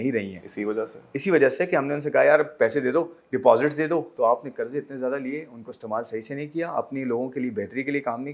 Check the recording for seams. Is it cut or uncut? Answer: cut